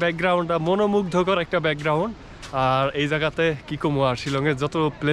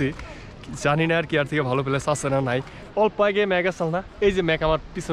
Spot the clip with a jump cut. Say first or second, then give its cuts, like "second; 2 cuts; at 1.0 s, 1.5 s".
second; 1 cut; at 2.8 s